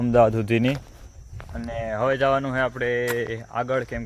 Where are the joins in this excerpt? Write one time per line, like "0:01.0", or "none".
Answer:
none